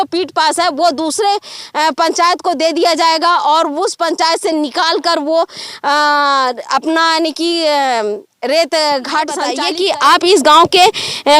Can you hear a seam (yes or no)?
yes